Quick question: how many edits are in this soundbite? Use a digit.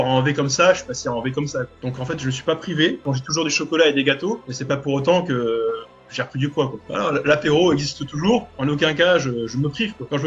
4